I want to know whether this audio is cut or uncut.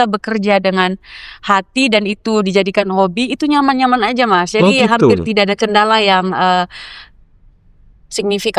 uncut